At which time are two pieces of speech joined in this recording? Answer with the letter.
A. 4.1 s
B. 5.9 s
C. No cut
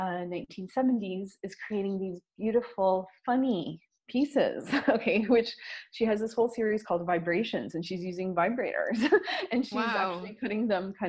C